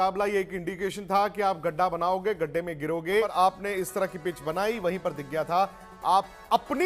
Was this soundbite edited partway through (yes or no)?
yes